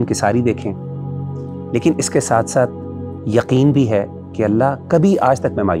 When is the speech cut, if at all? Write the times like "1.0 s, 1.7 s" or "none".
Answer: none